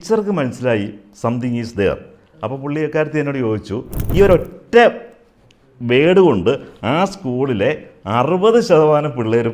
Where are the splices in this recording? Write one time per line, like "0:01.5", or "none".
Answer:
0:04.0